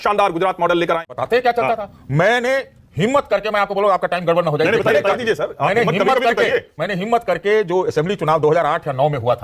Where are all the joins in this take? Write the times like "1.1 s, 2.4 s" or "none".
1.1 s